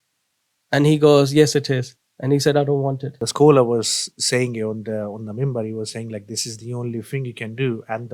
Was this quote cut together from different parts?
yes; 1 cut; at 3.2 s

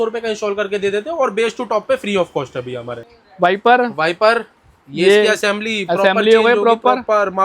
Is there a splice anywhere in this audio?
yes; 1 cut; at 3.0 s

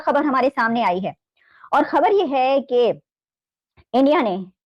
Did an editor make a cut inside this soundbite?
no; 0 cuts

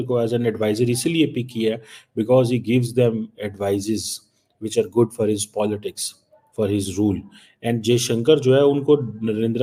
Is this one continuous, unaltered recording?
yes; 0 cuts

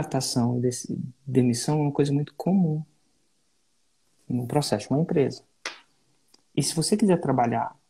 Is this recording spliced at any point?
no; 0 cuts

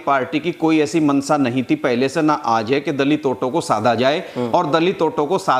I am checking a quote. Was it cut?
no; 0 cuts

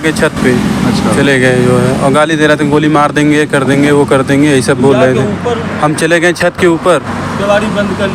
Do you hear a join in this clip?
no; 0 cuts

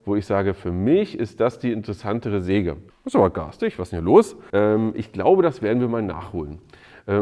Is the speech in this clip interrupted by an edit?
yes; 2 cuts; at 2.8 s, 4.4 s

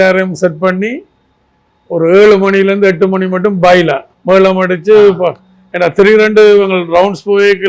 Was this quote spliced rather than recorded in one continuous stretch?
yes; 1 cut; at 4.1 s

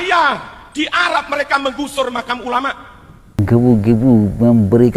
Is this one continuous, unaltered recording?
no; 1 cut; at 3.4 s

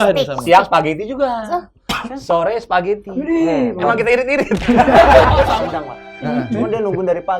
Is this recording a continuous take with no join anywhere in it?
no; 1 cut; at 5.5 s

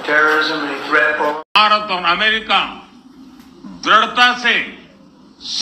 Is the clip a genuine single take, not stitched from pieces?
no; 1 cut; at 1.3 s

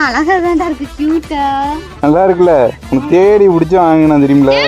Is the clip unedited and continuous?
yes; 0 cuts

